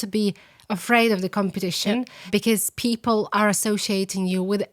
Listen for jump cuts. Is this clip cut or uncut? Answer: cut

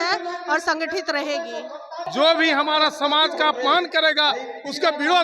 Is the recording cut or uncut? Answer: cut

